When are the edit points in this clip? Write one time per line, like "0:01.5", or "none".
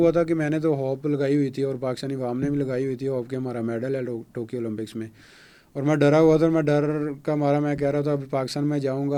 none